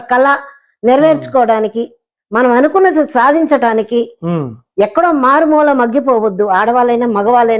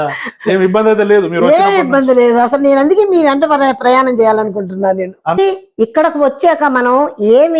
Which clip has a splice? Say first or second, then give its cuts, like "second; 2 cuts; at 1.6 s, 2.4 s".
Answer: second; 1 cut; at 5.4 s